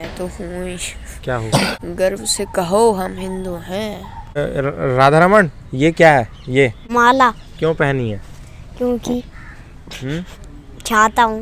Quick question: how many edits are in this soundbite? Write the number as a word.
three